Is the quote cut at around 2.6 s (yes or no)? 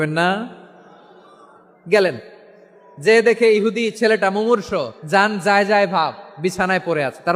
no